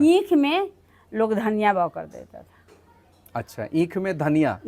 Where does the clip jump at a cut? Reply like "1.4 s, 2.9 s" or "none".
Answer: none